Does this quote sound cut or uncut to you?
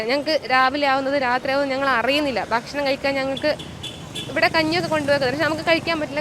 uncut